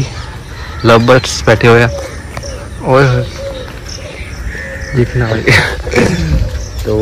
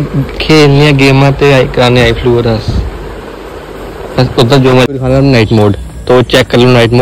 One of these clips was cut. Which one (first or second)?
second